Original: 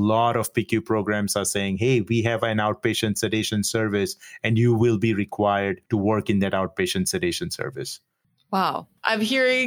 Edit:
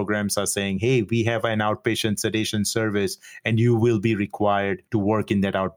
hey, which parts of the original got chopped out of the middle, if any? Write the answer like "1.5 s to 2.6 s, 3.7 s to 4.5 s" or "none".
none